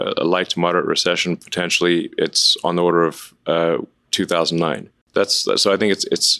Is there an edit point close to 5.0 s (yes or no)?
yes